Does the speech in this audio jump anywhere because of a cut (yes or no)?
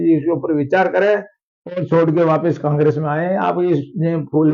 no